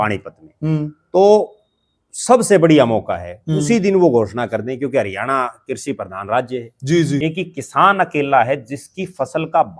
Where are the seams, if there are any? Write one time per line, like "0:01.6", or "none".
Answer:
0:07.2